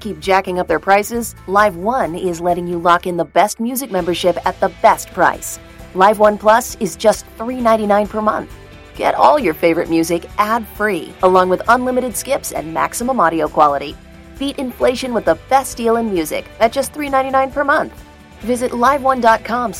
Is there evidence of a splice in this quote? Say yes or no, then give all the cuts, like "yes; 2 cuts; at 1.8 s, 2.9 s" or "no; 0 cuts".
no; 0 cuts